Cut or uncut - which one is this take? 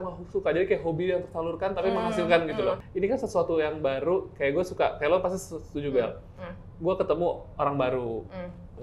uncut